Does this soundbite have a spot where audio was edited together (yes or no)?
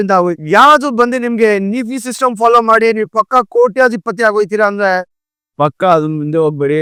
no